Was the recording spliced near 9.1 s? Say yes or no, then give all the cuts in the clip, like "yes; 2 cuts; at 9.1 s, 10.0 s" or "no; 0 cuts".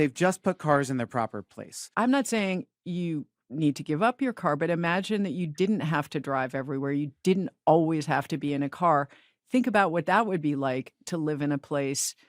no; 1 cut; at 1.8 s